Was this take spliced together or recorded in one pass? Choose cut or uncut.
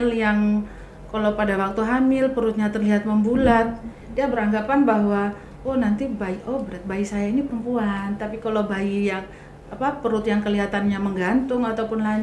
uncut